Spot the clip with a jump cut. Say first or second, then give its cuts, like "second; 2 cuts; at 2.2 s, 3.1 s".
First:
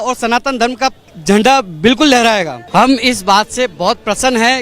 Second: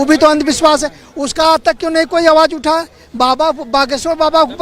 first; 2 cuts; at 1.1 s, 2.6 s